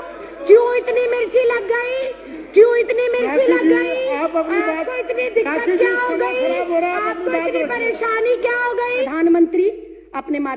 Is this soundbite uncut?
no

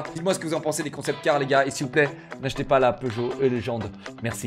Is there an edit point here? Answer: no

